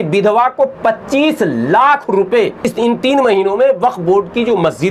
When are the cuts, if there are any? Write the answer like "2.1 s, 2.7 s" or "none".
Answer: 2.7 s